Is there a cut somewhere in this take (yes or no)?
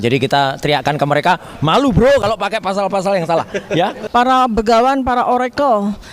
yes